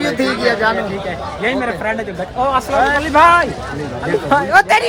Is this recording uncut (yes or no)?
yes